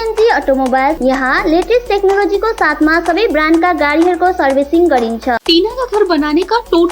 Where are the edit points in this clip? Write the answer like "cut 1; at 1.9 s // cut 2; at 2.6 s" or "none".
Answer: cut 1; at 1.0 s // cut 2; at 5.4 s